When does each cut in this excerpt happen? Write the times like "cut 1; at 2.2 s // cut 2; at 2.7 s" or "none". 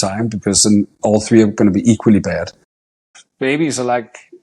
cut 1; at 3.0 s